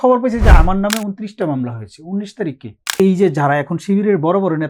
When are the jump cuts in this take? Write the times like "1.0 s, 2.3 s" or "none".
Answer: 2.9 s